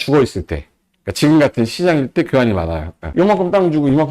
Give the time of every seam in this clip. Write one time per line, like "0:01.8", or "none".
0:02.9